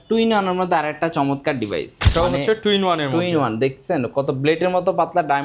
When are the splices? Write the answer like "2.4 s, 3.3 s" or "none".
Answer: 2.0 s